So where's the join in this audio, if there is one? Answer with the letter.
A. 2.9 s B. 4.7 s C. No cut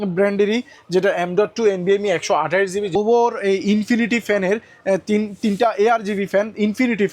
A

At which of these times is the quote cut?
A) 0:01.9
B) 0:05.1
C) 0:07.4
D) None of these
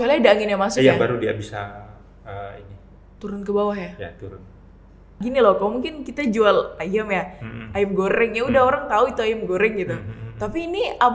B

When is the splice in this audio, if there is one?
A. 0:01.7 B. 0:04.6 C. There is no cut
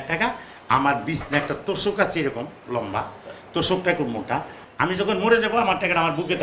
B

